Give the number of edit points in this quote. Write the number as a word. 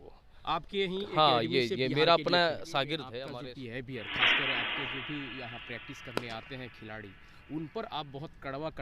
one